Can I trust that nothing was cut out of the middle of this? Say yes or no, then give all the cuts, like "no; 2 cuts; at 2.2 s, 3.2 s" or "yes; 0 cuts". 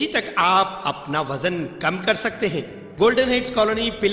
no; 1 cut; at 2.8 s